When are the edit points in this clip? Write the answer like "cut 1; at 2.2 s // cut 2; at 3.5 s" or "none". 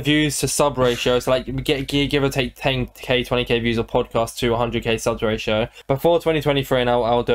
none